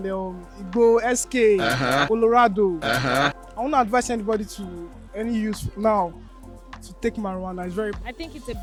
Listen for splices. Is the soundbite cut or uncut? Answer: uncut